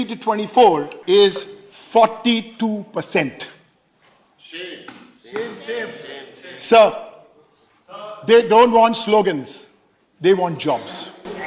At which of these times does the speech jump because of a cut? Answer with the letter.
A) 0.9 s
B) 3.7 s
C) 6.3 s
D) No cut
A